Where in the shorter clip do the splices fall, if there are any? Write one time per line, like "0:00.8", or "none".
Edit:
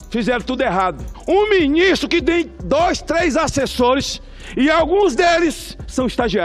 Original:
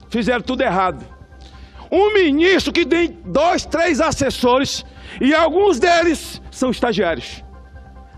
0:01.1